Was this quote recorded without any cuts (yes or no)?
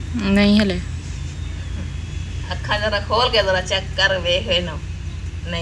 yes